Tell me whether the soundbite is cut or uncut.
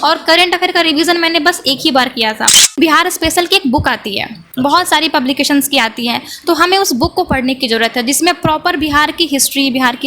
cut